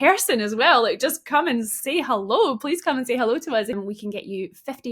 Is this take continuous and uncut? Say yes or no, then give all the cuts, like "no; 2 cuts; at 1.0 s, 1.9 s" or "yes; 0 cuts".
no; 1 cut; at 3.8 s